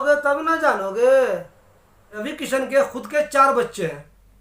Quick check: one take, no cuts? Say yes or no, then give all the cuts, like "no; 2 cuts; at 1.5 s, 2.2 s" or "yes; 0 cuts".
no; 1 cut; at 2.2 s